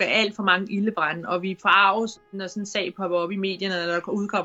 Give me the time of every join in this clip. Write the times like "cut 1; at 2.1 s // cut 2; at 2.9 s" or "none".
cut 1; at 2.2 s